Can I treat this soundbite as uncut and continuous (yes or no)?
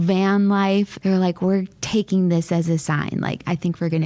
no